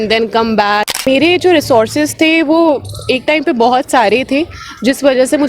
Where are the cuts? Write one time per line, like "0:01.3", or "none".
0:00.9